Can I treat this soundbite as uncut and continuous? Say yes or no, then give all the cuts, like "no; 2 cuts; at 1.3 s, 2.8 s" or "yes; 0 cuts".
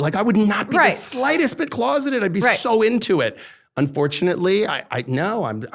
yes; 0 cuts